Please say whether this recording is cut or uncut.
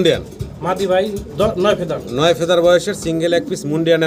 uncut